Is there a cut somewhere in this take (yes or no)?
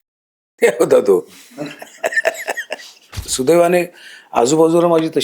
yes